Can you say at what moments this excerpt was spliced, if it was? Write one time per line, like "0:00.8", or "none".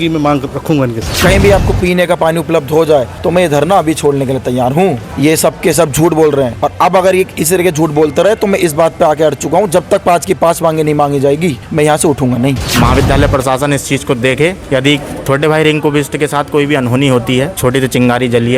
0:01.1
0:03.1
0:05.1
0:06.6
0:11.6
0:12.6
0:14.8
0:17.5

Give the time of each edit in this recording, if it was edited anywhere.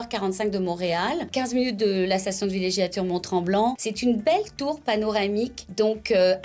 0:01.3
0:03.9
0:05.6

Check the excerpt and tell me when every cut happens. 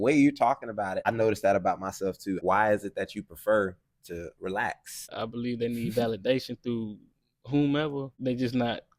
0:01.0
0:02.4
0:05.1
0:08.1

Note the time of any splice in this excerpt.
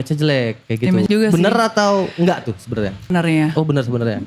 0:01.0
0:03.1

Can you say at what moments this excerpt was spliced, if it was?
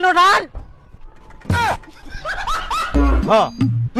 0:03.0

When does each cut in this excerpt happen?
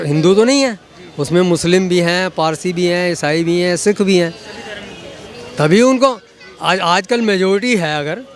none

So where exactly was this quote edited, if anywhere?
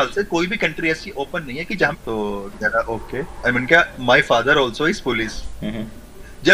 0:01.9

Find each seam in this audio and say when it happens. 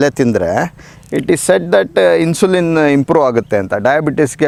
none

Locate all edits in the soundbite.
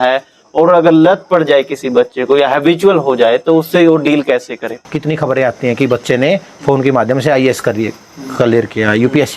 0:04.8

